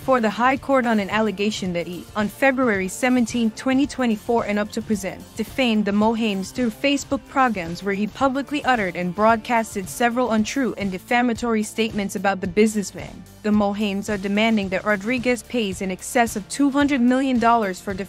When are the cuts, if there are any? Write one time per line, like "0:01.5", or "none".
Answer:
none